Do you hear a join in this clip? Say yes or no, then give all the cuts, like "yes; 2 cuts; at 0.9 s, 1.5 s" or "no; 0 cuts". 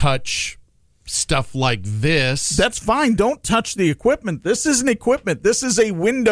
no; 0 cuts